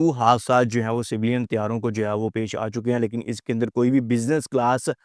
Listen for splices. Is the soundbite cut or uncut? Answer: uncut